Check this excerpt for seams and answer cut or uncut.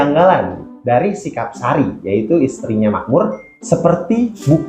cut